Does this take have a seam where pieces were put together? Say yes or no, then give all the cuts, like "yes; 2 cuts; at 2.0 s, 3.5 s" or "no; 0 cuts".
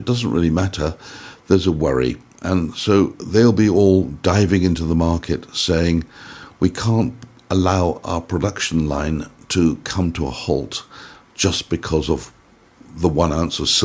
no; 0 cuts